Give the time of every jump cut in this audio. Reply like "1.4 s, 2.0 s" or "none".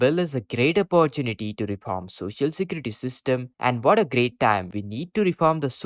none